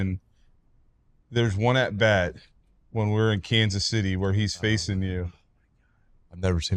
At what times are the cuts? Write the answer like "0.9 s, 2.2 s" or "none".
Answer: none